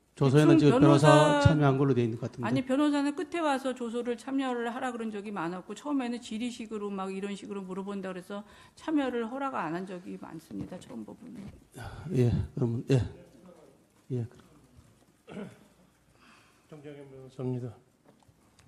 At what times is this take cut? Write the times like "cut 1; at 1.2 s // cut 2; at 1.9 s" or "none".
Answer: none